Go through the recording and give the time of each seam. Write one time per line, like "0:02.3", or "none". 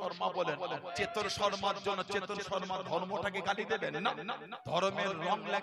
0:00.9
0:04.5